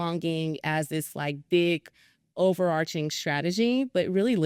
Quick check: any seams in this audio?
no; 0 cuts

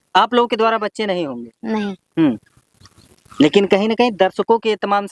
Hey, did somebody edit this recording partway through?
no; 0 cuts

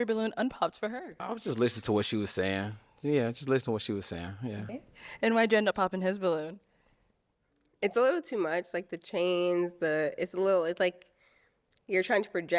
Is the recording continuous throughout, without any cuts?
no; 1 cut; at 4.8 s

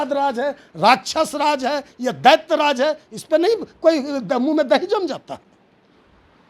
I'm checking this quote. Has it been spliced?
no; 0 cuts

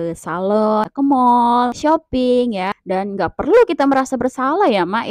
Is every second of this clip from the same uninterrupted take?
no; 3 cuts; at 0.9 s, 1.8 s, 2.7 s

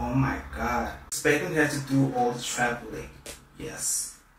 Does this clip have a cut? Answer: yes; 1 cut; at 1.0 s

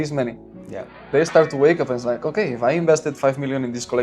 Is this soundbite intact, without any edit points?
no; 1 cut; at 1.1 s

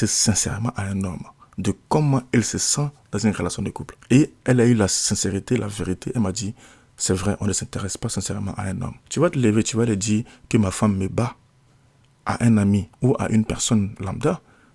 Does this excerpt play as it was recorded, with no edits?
no; 1 cut; at 9.0 s

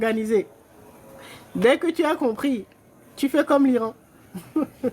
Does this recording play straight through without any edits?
yes; 0 cuts

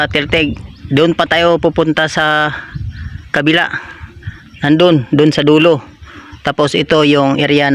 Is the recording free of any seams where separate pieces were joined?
yes; 0 cuts

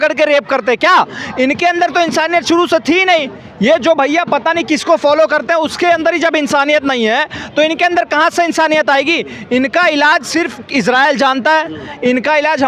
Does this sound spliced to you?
no; 0 cuts

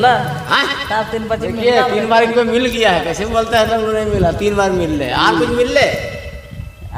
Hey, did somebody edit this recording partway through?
no; 0 cuts

